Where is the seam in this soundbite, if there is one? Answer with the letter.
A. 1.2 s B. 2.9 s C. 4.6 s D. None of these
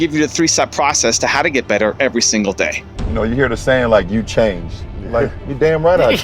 B